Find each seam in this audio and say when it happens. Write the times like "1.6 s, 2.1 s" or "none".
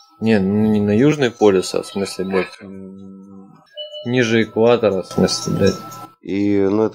3.6 s